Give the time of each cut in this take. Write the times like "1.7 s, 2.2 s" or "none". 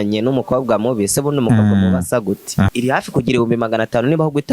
2.7 s